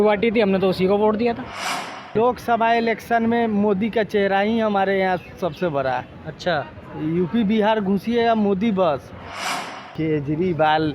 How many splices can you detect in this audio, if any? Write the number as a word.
two